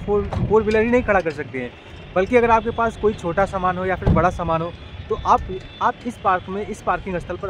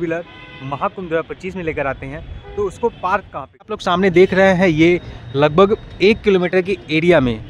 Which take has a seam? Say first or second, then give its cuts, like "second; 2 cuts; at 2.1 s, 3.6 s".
second; 1 cut; at 3.8 s